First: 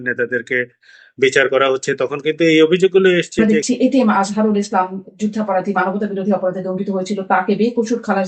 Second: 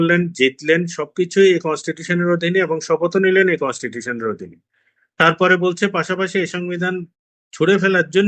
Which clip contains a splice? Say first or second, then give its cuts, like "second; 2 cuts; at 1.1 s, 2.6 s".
first; 1 cut; at 3.4 s